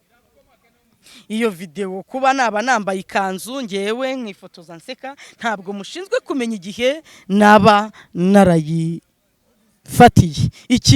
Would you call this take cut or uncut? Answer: uncut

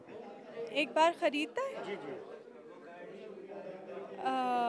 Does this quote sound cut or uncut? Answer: uncut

